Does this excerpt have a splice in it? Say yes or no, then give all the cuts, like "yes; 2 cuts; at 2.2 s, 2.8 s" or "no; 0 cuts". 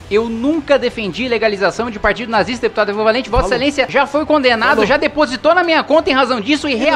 yes; 1 cut; at 3.9 s